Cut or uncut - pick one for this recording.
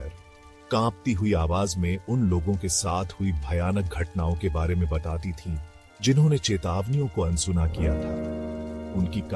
uncut